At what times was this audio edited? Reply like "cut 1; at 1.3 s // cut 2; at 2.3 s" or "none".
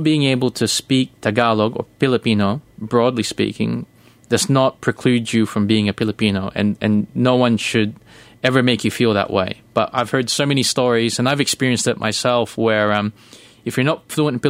none